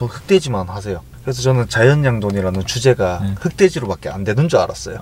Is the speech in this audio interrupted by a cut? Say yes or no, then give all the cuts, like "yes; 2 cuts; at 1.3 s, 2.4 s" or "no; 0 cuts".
no; 0 cuts